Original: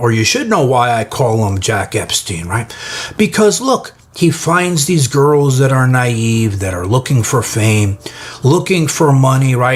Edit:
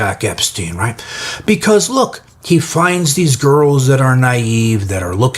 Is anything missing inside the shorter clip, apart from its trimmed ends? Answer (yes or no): no